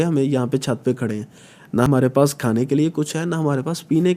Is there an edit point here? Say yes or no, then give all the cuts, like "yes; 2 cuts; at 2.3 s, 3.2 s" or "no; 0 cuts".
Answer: no; 0 cuts